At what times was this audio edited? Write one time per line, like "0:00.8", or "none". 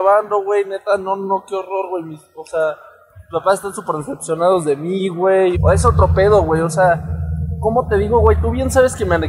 0:05.6